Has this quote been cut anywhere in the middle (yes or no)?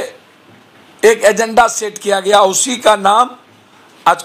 no